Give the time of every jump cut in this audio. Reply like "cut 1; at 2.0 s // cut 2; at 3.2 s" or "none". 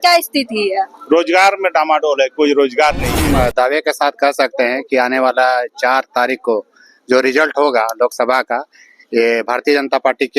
cut 1; at 3.1 s